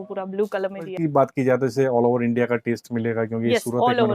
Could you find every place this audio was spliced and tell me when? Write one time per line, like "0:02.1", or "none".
0:00.9